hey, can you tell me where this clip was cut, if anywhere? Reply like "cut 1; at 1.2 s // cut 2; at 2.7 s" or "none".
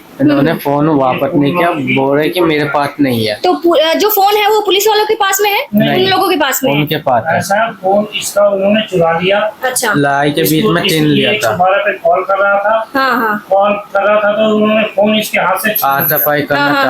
none